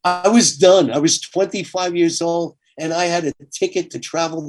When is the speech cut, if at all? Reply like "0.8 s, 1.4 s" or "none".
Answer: none